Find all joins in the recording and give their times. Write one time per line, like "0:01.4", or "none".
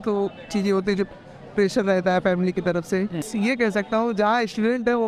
0:03.3